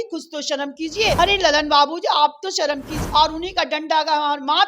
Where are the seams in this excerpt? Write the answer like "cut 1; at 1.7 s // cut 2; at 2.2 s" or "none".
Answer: cut 1; at 1.2 s // cut 2; at 3.0 s